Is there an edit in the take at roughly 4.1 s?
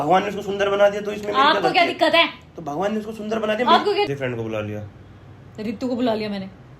yes; 1 cut; at 4.1 s

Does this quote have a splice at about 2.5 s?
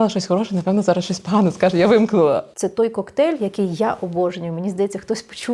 yes; 1 cut; at 2.5 s

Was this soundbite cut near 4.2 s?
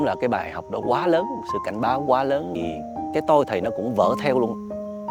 no; 1 cut; at 2.5 s

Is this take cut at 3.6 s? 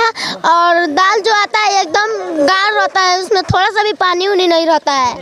no; 0 cuts

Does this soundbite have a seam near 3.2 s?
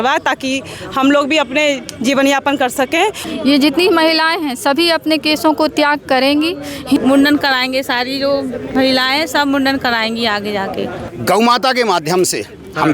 yes; 3 cuts; at 3.2 s, 7.0 s, 11.0 s

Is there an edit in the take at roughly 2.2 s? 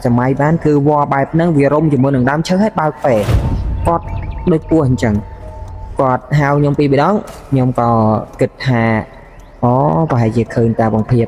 no; 0 cuts

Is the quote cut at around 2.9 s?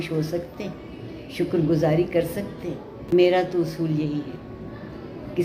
yes; 1 cut; at 2.9 s

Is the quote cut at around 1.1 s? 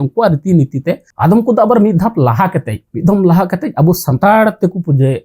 yes; 1 cut; at 1.1 s

